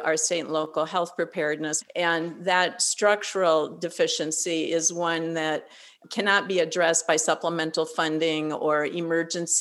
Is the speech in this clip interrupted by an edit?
yes; 1 cut; at 1.8 s

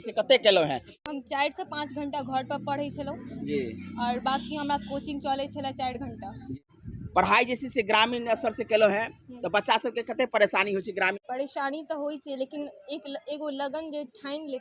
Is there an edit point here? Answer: yes; 2 cuts; at 6.5 s, 11.2 s

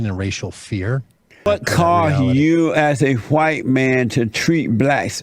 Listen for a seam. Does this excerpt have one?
yes; 1 cut; at 1.5 s

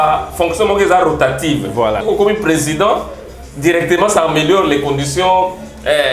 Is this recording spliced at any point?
yes; 1 cut; at 2.0 s

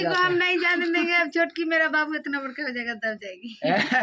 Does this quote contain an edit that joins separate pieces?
no; 0 cuts

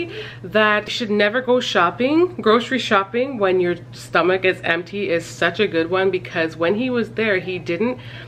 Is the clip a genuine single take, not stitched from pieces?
no; 1 cut; at 0.9 s

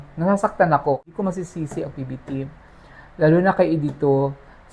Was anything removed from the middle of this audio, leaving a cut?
yes; 1 cut; at 1.0 s

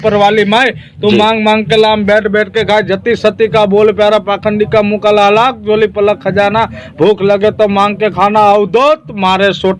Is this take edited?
no; 0 cuts

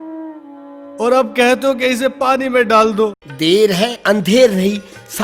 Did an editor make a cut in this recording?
yes; 1 cut; at 3.2 s

